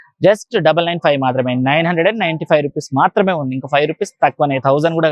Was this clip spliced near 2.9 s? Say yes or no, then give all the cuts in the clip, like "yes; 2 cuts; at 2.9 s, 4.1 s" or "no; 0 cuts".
no; 0 cuts